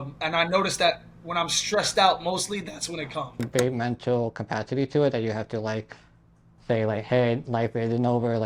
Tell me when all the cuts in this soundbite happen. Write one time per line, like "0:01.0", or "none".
0:03.4